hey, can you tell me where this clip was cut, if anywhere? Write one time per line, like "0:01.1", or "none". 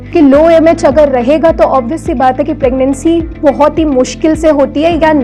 none